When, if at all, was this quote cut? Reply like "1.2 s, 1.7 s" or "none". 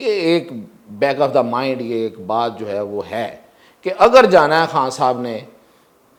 none